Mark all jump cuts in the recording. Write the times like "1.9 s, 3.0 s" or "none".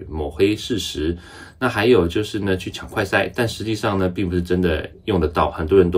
none